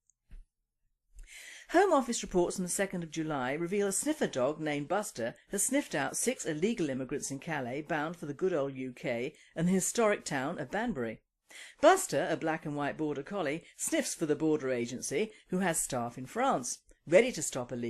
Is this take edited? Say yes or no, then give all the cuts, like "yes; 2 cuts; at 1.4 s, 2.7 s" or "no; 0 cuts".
yes; 1 cut; at 5.9 s